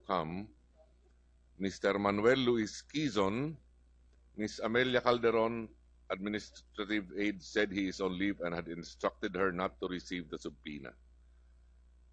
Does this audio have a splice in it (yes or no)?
yes